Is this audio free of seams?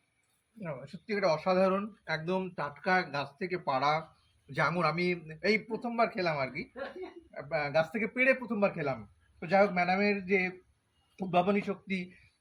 yes; 0 cuts

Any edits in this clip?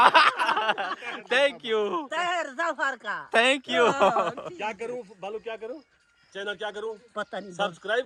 no; 0 cuts

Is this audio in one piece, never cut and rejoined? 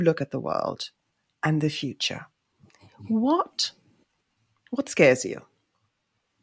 yes; 0 cuts

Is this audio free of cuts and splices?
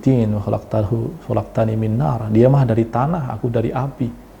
yes; 0 cuts

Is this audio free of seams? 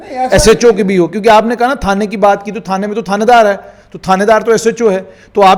yes; 0 cuts

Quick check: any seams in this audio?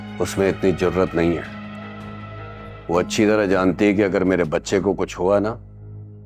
no; 0 cuts

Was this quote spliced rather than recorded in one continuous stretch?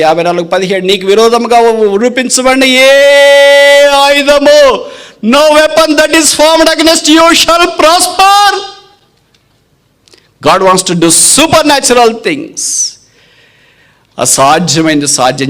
no; 0 cuts

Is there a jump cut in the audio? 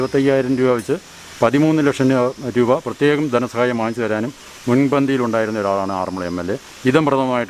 no; 0 cuts

